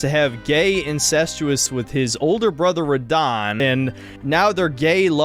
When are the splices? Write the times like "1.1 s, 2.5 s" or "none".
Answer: 1.6 s, 3.6 s